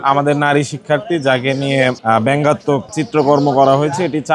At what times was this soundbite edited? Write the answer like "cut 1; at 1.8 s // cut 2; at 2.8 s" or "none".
cut 1; at 3.0 s